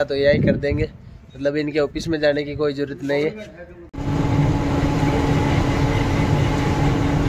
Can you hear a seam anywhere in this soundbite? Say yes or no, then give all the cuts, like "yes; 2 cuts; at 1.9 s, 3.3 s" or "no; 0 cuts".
no; 0 cuts